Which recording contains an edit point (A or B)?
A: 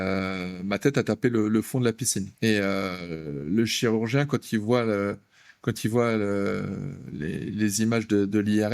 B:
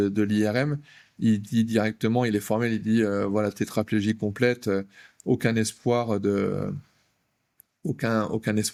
A